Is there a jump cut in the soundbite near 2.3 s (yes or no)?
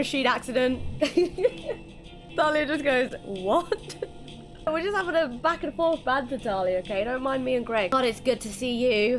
yes